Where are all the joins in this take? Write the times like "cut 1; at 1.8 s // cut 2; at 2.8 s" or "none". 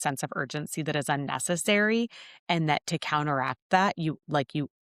none